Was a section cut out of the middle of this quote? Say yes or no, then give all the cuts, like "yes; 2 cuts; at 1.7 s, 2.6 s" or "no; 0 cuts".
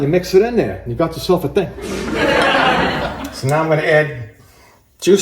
yes; 1 cut; at 3.1 s